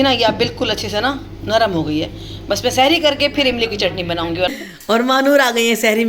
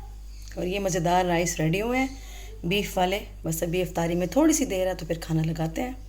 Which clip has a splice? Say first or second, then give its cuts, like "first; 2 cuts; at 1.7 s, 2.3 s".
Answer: first; 1 cut; at 4.5 s